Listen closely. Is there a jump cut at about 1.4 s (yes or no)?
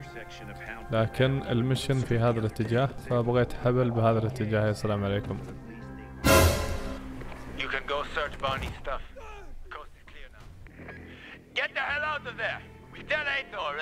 no